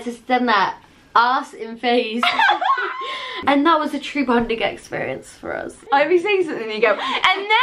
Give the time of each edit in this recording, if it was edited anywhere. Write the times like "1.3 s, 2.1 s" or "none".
3.3 s, 5.7 s